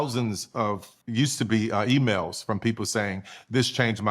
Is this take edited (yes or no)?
no